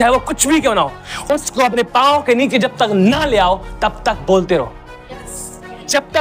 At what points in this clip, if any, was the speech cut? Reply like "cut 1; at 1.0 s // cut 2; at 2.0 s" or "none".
none